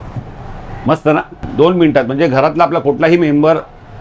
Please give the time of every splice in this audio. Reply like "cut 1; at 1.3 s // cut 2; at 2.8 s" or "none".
cut 1; at 1.4 s